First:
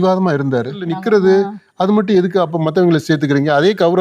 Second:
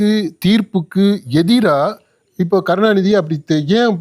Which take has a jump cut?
first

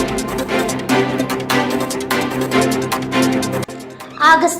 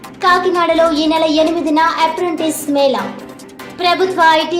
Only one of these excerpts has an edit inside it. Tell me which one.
first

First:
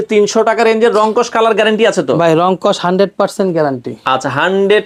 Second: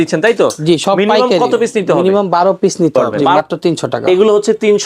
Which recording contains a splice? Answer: second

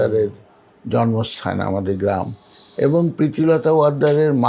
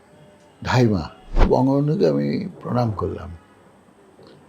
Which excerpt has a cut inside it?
second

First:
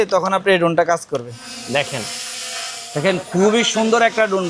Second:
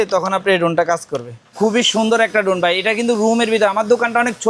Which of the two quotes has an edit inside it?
second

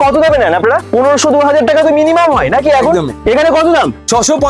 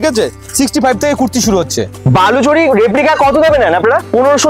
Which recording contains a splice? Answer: second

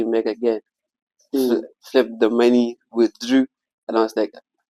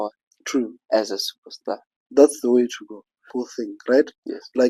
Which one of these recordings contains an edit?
second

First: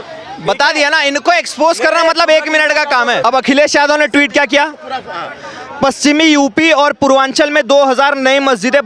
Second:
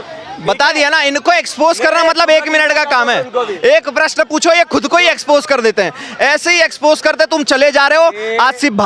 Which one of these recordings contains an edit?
first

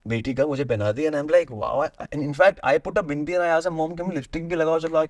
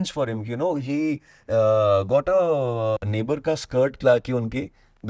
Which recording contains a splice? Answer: second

